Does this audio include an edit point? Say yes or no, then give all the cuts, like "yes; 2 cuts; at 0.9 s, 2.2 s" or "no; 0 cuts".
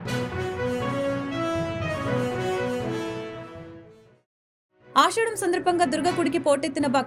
no; 0 cuts